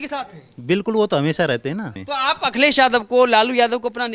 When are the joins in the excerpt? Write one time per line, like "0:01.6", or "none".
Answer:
0:02.0